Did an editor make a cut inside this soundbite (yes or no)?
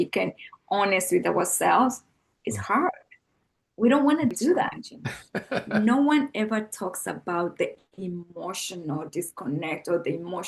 yes